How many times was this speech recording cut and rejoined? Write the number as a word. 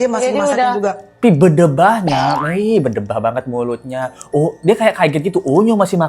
one